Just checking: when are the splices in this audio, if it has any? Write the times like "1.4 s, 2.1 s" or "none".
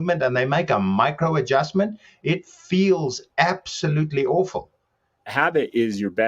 5.2 s

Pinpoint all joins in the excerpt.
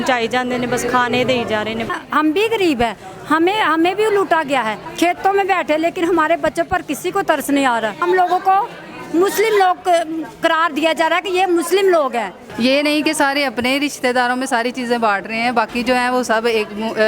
1.9 s, 4.8 s, 8.0 s, 12.4 s

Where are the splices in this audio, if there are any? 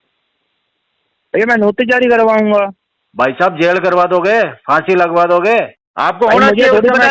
5.8 s

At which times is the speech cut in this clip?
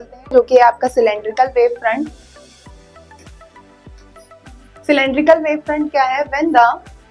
none

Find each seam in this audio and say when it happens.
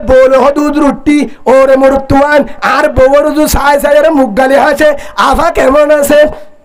none

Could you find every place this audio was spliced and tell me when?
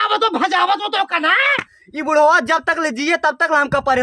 1.6 s

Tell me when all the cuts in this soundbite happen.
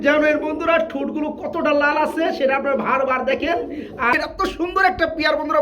4.1 s

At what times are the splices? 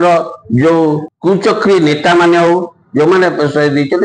1.1 s

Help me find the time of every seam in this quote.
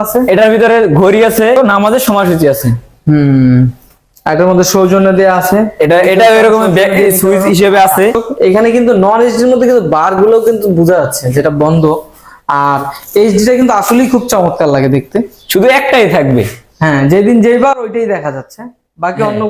1.6 s, 8.2 s

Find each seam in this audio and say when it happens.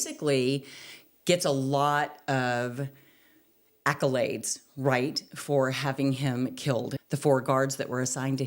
7.0 s

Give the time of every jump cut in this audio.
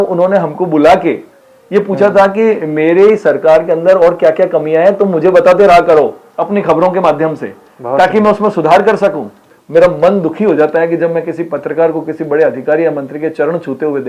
9.5 s

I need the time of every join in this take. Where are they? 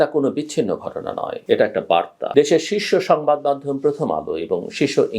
1.3 s, 2.2 s

